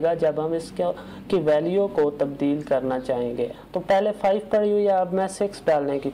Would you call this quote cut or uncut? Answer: cut